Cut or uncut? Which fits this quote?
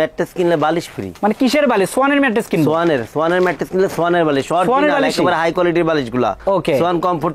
uncut